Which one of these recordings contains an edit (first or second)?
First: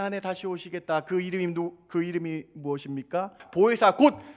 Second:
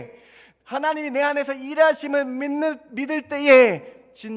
first